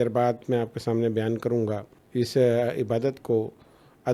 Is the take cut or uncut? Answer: cut